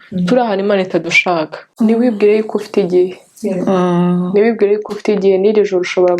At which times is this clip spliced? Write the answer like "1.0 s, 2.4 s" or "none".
1.6 s